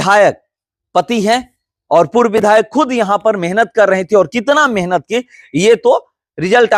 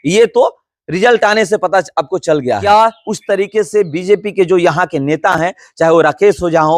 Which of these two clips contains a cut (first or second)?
second